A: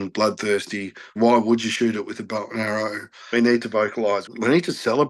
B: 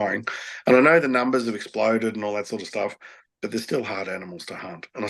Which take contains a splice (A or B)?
A